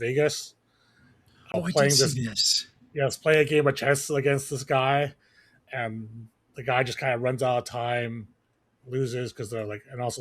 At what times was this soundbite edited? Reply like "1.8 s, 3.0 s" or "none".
1.5 s